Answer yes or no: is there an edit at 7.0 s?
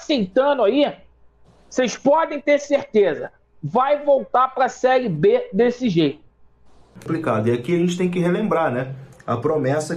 yes